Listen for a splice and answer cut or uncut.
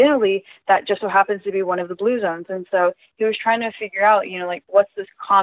uncut